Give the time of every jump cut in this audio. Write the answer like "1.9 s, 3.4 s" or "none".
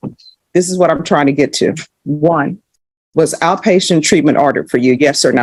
none